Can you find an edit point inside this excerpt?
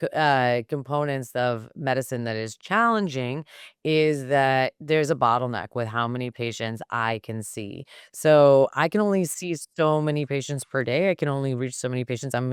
no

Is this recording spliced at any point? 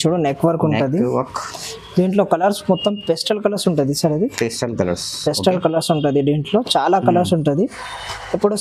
no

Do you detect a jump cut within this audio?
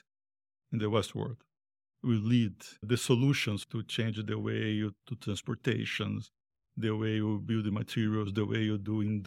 no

